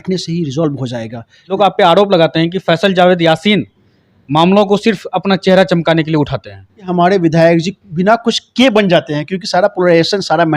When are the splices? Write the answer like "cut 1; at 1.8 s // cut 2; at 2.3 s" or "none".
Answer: cut 1; at 1.5 s // cut 2; at 6.7 s